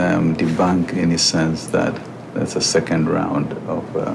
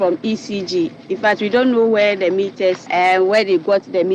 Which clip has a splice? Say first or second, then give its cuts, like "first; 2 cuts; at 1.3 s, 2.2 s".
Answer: second; 1 cut; at 2.8 s